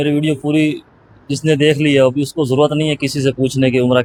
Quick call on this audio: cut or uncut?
uncut